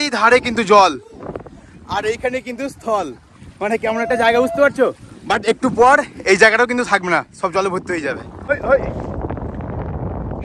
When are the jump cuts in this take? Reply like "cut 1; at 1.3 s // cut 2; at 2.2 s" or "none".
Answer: none